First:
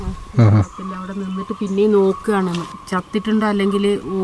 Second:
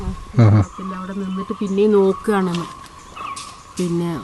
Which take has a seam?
first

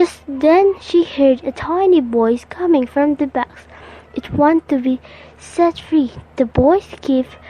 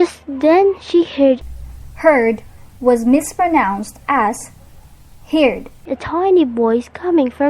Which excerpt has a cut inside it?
first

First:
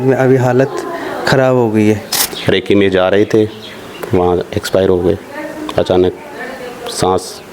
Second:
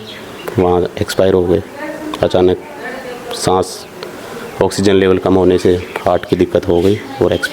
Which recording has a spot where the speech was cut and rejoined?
first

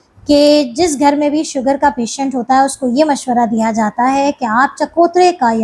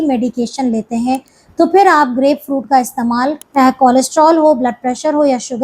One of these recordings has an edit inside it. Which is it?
second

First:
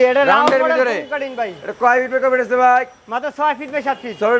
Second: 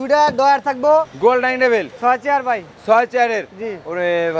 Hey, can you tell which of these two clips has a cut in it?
second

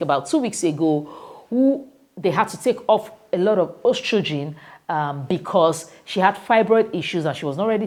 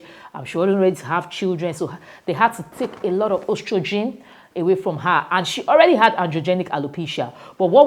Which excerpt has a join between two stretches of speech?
second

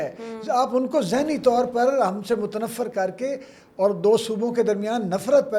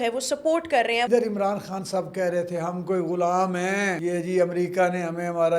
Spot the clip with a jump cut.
second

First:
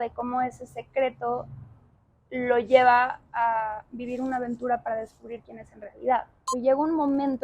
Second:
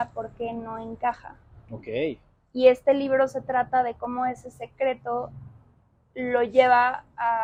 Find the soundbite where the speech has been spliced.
first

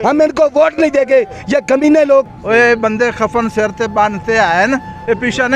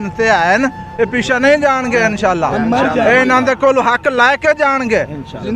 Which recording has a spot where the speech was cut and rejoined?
first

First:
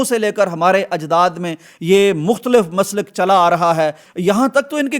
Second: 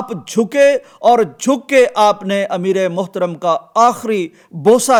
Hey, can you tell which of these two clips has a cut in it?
first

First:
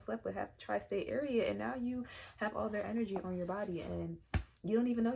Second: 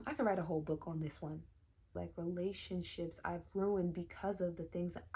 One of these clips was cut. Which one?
second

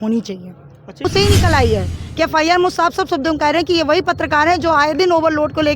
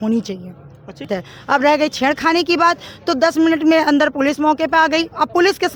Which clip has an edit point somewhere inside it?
first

